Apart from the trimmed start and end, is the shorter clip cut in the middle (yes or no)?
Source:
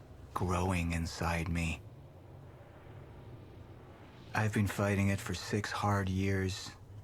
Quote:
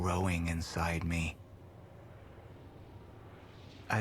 no